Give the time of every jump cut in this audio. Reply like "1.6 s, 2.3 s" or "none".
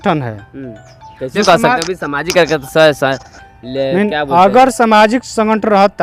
none